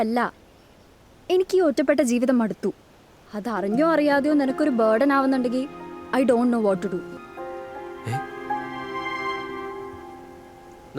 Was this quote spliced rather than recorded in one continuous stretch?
yes; 1 cut; at 7.2 s

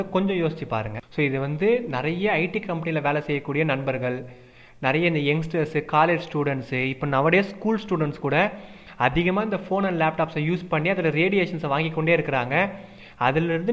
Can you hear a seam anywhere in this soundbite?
yes; 1 cut; at 1.0 s

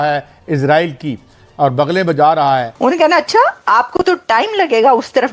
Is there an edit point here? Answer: yes; 1 cut; at 2.7 s

